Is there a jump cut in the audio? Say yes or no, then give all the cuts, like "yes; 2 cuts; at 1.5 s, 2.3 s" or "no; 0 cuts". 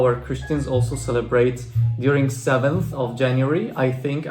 no; 0 cuts